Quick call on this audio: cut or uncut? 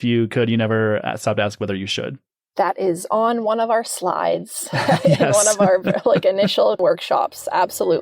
cut